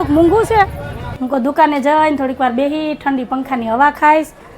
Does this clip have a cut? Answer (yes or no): yes